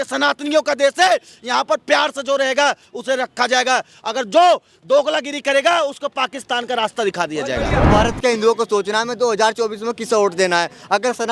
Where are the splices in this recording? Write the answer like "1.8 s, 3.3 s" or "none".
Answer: 7.9 s